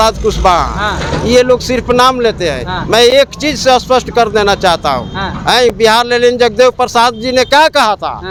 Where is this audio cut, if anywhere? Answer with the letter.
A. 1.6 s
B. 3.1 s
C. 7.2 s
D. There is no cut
D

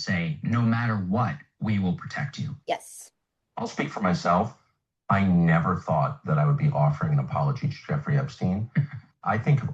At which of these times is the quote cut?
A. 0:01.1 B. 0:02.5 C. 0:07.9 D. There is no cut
B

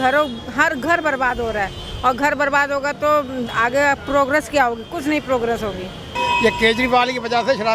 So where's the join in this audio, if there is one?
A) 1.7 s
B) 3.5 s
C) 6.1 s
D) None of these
C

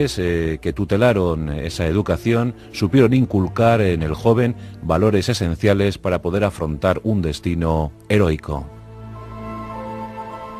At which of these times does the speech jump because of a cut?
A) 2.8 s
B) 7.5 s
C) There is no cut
B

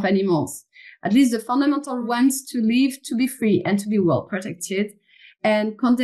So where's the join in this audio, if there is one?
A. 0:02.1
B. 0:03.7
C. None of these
A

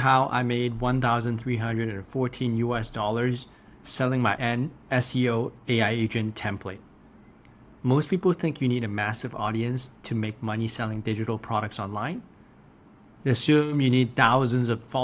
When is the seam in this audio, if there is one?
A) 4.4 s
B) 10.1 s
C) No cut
A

